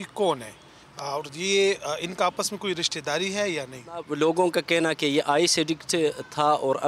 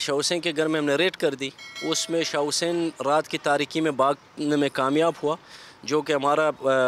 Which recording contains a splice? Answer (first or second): first